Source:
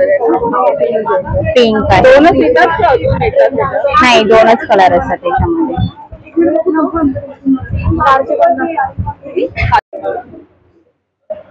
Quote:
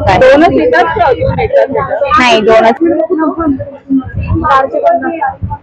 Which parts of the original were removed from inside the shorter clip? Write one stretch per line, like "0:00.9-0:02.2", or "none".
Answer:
0:04.6-0:06.3